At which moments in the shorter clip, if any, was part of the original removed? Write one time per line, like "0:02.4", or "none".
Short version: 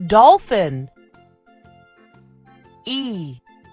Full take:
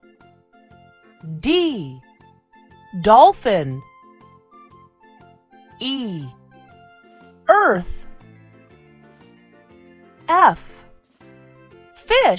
none